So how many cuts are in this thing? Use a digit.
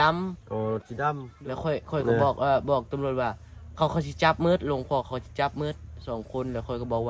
1